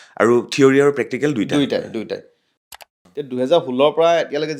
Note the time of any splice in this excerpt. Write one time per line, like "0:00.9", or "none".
0:02.5